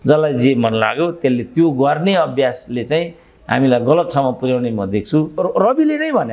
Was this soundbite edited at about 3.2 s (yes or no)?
no